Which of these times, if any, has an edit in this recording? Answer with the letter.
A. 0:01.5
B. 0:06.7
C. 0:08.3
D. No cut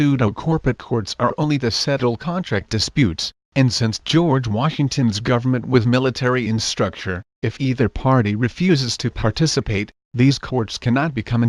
D